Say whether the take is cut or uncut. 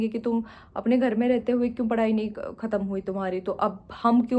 uncut